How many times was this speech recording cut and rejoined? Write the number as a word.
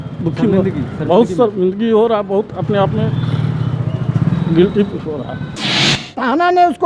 one